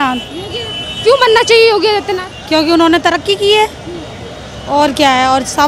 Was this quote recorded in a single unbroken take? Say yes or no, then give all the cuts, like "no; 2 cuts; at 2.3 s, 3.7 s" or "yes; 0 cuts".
yes; 0 cuts